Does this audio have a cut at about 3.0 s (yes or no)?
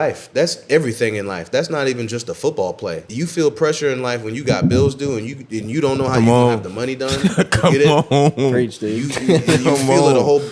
yes